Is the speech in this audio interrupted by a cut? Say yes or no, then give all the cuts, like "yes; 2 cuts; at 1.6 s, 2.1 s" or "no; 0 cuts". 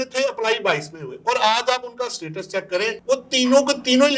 no; 0 cuts